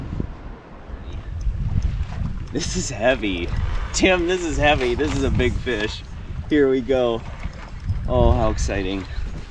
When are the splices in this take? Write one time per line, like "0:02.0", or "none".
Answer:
0:01.3